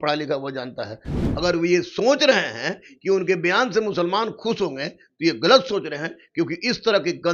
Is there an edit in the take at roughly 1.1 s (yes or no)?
yes